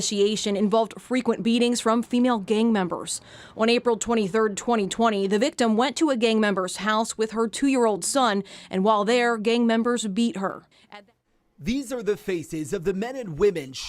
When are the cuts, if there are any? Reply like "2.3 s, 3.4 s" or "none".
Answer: 10.9 s